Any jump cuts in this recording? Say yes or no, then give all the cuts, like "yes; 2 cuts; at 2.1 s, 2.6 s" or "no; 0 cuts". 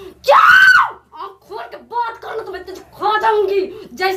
no; 0 cuts